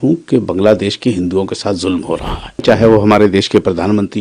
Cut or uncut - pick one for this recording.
cut